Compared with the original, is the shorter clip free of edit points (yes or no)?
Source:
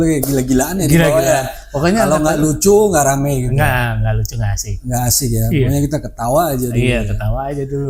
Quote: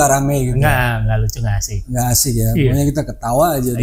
yes